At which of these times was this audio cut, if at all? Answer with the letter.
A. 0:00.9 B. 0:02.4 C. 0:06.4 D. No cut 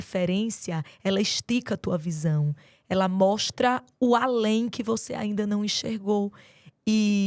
D